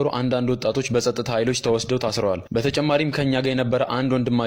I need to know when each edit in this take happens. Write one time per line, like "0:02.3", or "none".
none